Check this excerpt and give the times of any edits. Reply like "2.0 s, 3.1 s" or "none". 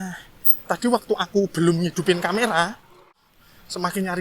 3.1 s

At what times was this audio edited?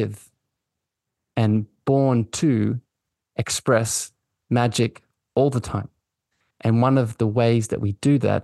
none

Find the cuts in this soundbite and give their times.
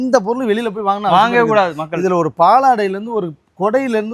none

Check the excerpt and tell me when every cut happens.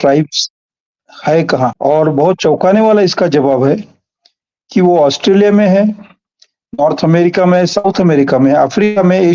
1.8 s

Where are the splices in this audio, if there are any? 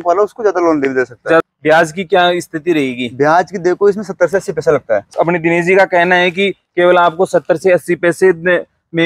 1.4 s, 5.1 s

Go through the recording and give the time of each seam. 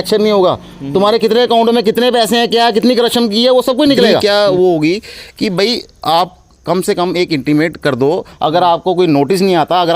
4.2 s

